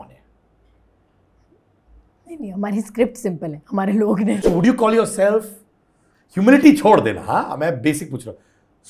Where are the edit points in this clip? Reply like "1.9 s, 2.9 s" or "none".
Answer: 4.4 s